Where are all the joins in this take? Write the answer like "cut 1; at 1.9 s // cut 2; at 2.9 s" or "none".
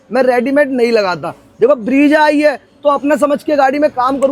none